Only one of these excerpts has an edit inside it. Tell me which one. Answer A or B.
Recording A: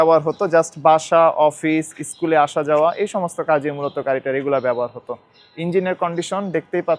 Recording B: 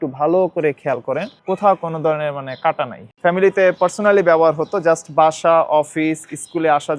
B